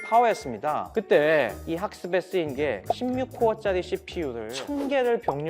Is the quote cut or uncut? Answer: cut